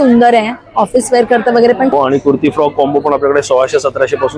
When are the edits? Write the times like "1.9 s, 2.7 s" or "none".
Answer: 1.9 s